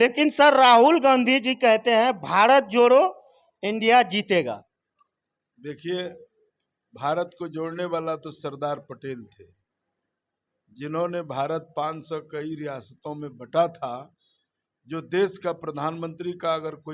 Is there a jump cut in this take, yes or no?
no